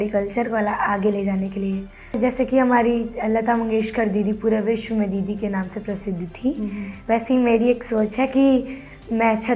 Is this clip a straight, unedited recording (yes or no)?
no